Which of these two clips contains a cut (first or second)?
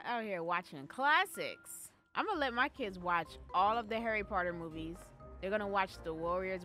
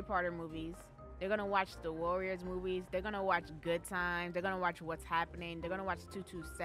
first